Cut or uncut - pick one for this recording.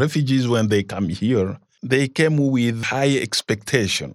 cut